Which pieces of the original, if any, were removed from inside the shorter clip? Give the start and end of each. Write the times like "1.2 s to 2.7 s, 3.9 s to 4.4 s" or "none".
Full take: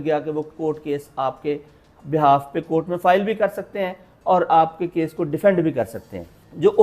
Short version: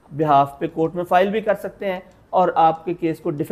none

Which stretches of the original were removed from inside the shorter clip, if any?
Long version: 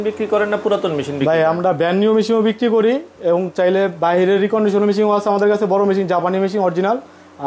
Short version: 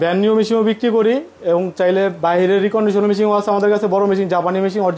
none

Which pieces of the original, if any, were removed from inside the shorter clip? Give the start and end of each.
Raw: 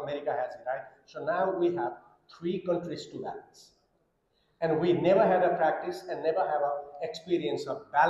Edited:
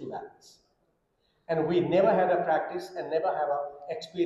none

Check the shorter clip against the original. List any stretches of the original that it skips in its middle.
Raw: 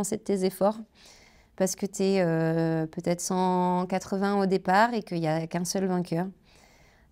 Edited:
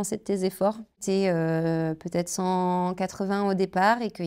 1.0 s to 1.9 s

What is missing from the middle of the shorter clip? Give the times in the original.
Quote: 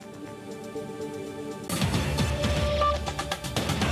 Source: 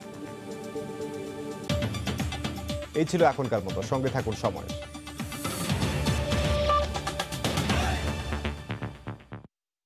1.7 s to 5.5 s

